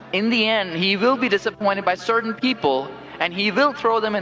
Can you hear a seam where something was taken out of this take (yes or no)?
no